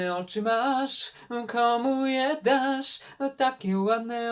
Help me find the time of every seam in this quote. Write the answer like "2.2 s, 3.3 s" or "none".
none